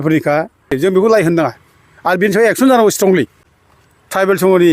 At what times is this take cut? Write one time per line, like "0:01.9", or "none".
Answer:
0:00.8
0:03.5